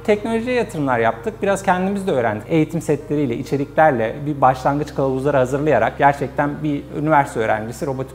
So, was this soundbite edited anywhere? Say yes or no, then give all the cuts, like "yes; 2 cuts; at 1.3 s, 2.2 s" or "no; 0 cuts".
no; 0 cuts